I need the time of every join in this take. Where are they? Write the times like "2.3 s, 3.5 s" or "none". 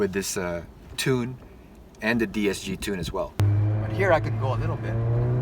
3.4 s